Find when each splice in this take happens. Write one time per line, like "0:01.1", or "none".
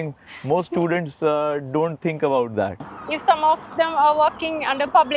0:02.9